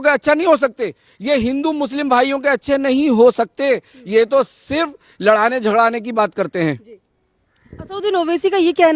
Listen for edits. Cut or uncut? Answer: uncut